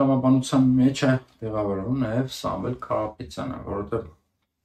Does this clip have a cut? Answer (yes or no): no